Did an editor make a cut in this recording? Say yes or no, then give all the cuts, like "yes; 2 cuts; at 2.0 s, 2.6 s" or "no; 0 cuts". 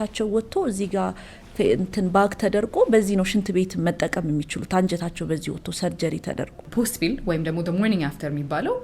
yes; 1 cut; at 6.7 s